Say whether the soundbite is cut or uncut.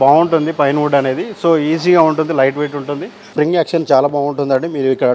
cut